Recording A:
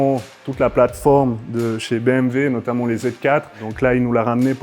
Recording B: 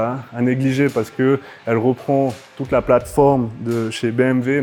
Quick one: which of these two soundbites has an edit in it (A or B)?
A